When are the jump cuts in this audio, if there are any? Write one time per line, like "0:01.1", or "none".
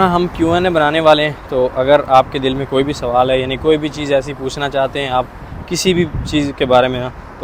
none